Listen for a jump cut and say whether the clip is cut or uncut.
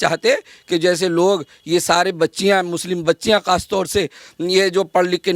uncut